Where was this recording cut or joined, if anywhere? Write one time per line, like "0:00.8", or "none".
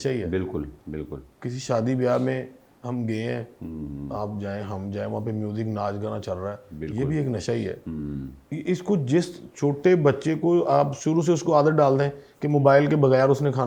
none